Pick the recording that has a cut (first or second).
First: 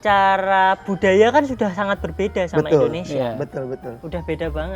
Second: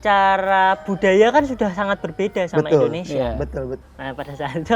second